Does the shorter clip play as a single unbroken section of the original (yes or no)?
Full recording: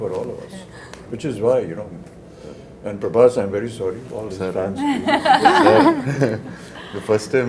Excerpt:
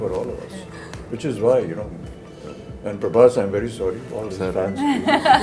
yes